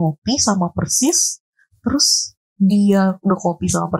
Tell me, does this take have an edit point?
no; 0 cuts

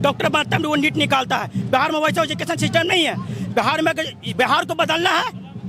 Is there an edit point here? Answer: no; 0 cuts

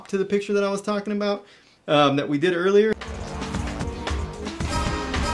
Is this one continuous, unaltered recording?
no; 1 cut; at 3.0 s

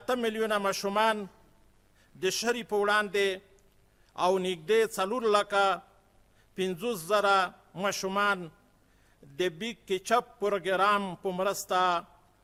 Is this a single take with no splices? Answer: yes; 0 cuts

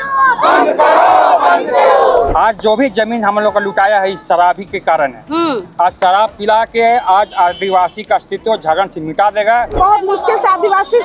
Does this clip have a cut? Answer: yes; 2 cuts; at 2.3 s, 9.8 s

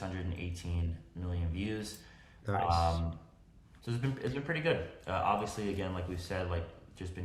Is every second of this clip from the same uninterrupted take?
yes; 0 cuts

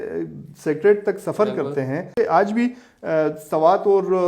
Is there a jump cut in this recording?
yes; 1 cut; at 2.1 s

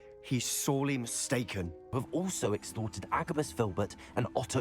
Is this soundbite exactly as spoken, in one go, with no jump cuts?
no; 1 cut; at 1.9 s

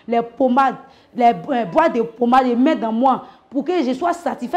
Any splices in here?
no; 0 cuts

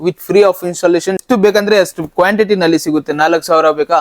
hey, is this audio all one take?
no; 1 cut; at 1.2 s

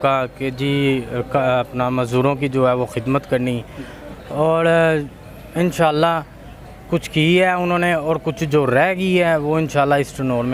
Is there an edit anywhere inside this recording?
no; 0 cuts

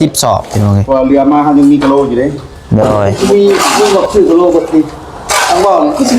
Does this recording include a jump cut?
yes; 1 cut; at 3.1 s

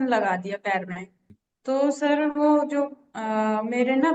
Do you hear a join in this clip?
yes; 1 cut; at 1.5 s

